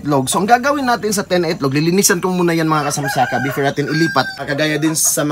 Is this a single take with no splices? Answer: no; 1 cut; at 4.3 s

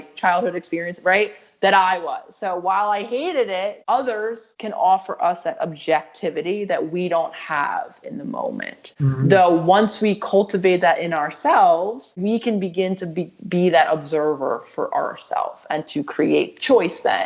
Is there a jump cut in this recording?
no; 0 cuts

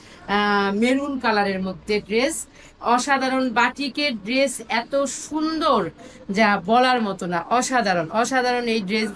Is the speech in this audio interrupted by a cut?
no; 0 cuts

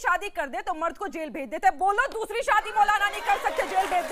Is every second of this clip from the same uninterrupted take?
yes; 0 cuts

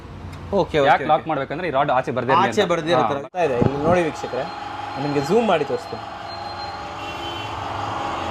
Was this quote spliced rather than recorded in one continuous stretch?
yes; 1 cut; at 3.2 s

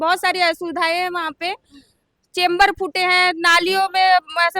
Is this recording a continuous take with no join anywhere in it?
yes; 0 cuts

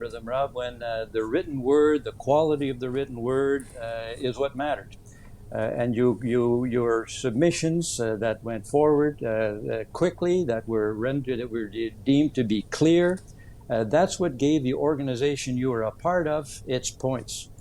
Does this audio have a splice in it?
no; 0 cuts

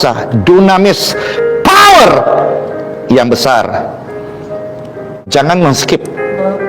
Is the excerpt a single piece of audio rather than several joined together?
no; 1 cut; at 5.2 s

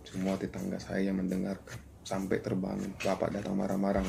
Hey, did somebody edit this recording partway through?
no; 0 cuts

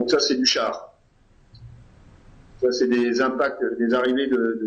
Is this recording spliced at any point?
no; 0 cuts

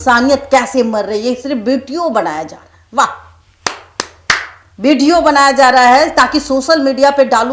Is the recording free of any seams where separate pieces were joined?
yes; 0 cuts

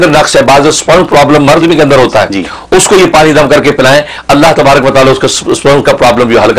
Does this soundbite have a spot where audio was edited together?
no; 0 cuts

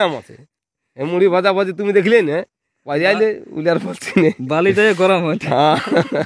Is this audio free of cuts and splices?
yes; 0 cuts

